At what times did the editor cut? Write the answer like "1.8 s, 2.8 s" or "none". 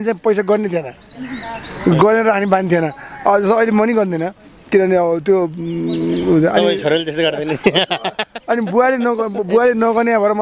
none